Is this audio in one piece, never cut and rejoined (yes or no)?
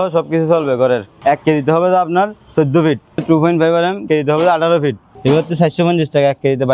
no